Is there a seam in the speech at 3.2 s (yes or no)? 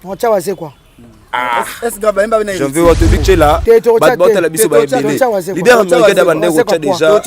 yes